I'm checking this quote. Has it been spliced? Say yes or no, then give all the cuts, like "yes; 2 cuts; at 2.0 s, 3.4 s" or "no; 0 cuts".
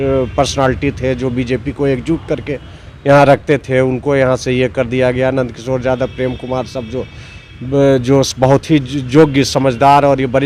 no; 0 cuts